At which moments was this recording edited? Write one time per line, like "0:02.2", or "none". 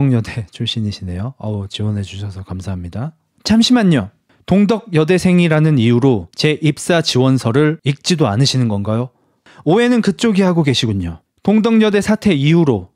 0:09.4